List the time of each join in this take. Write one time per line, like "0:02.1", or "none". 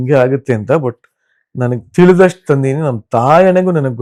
none